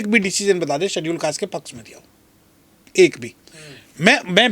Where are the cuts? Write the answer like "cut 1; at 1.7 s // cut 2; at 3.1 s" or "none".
none